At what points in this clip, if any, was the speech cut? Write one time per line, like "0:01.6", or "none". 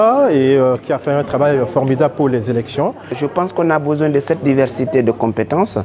0:03.4